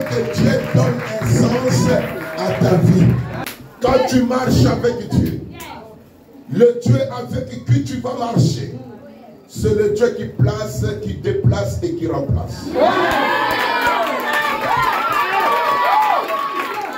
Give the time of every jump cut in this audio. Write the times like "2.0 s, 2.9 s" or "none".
3.3 s